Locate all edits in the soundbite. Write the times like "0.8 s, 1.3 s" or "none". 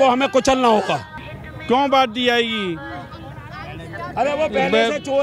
1.1 s